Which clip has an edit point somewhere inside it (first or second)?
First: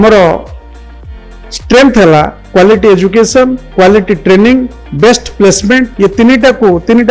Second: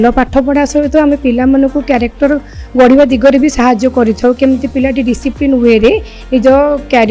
first